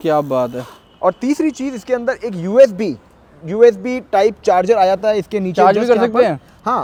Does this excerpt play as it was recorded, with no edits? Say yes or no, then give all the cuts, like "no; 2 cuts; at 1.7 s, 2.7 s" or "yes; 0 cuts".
yes; 0 cuts